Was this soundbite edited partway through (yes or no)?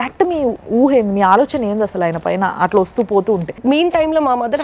yes